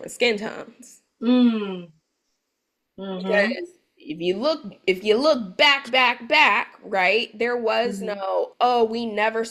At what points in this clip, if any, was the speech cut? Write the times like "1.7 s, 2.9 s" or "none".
none